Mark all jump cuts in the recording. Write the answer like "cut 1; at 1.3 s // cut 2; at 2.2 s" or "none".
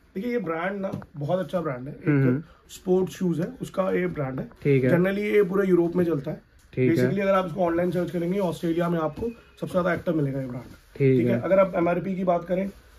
none